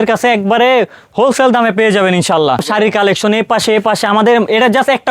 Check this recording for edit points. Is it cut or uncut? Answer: cut